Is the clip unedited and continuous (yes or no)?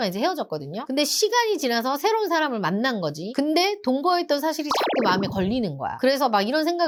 yes